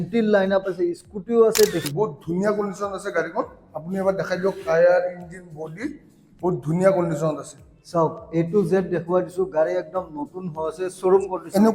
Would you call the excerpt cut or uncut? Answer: cut